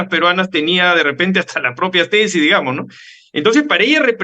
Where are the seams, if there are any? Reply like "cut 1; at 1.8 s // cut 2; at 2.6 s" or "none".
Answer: none